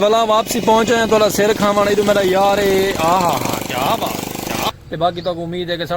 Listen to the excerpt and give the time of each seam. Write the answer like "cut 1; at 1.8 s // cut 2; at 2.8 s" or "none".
cut 1; at 4.7 s